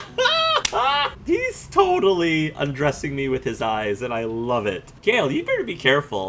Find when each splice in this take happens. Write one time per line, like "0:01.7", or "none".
0:01.1
0:04.9